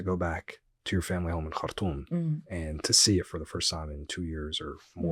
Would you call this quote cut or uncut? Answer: uncut